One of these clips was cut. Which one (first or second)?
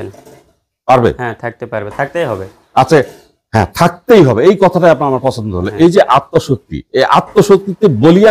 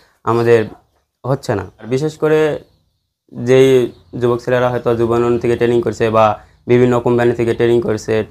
second